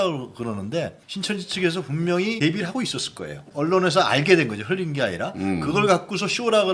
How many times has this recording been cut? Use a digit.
2